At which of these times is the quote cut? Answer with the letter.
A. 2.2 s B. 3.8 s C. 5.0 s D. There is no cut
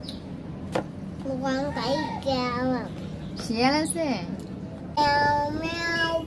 C